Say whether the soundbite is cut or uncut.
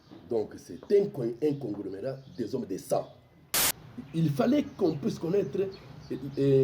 cut